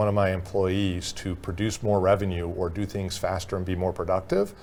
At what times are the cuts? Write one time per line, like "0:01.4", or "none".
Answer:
none